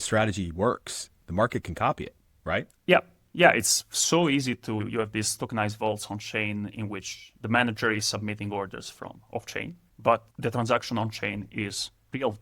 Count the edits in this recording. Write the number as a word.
two